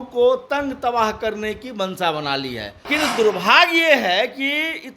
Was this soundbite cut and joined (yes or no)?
yes